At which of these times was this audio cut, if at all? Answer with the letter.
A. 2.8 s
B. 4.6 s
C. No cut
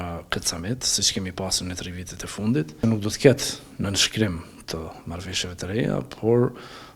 A